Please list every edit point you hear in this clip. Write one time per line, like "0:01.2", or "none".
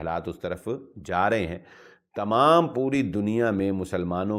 none

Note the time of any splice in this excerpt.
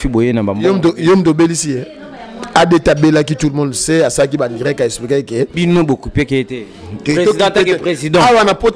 0:05.5

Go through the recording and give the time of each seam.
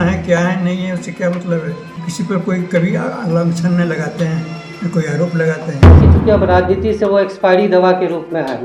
0:02.0
0:06.1

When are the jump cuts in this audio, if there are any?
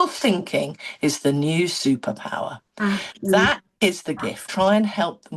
0:04.4

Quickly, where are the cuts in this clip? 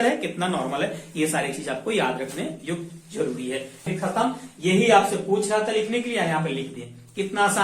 0:03.8

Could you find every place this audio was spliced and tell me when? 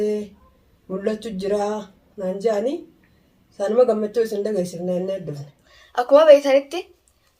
0:05.7

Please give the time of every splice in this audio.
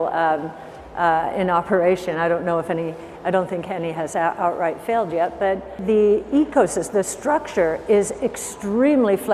0:05.8

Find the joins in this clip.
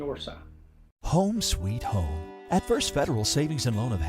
0:00.9

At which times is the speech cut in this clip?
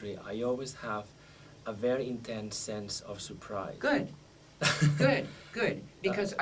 0:03.8

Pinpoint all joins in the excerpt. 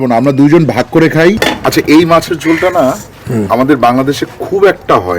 0:01.4

